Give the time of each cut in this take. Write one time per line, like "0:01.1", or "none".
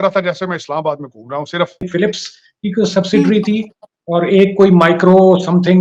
0:01.9